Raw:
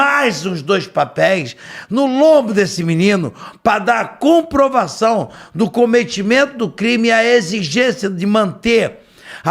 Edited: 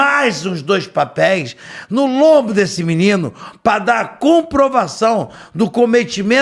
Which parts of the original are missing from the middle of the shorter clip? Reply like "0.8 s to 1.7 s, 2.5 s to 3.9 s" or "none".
none